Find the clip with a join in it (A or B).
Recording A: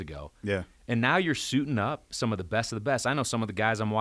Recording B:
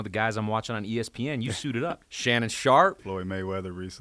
B